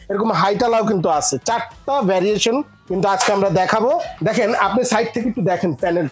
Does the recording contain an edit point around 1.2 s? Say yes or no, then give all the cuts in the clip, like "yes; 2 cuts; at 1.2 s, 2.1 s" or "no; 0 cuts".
no; 1 cut; at 4.1 s